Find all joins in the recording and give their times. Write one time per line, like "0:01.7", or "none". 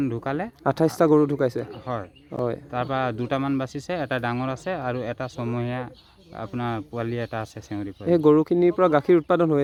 none